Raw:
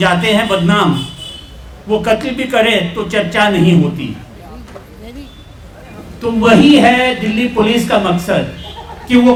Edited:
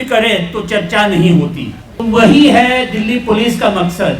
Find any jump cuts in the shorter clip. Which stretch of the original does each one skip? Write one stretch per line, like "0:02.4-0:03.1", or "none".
0:04.3-0:06.2